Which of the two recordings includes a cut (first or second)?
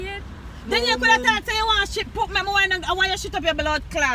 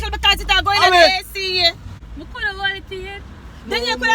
second